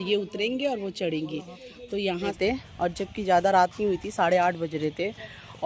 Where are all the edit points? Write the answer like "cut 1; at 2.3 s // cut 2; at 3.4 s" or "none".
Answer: cut 1; at 2.3 s